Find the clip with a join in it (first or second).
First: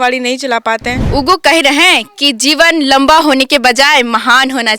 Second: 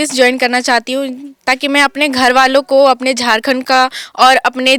first